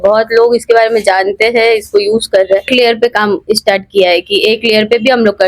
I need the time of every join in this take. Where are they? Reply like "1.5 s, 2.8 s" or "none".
none